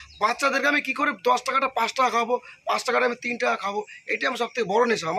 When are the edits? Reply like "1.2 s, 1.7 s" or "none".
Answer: none